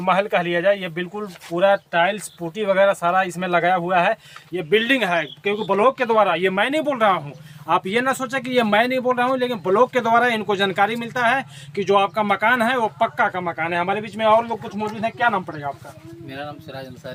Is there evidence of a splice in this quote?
no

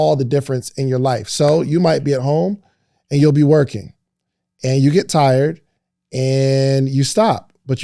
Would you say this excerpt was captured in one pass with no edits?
yes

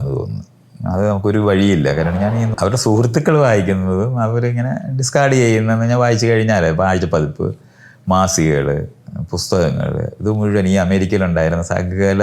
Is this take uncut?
no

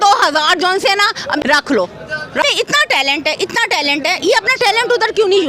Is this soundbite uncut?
no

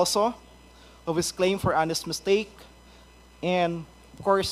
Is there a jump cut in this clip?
no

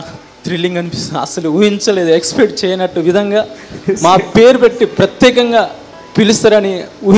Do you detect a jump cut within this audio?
no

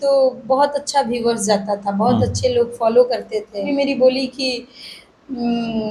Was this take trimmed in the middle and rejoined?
yes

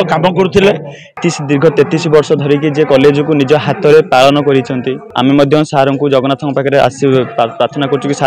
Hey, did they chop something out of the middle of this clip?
yes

